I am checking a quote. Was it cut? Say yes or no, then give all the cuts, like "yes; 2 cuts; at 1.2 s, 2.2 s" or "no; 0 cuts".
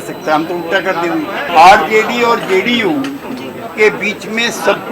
yes; 1 cut; at 1.5 s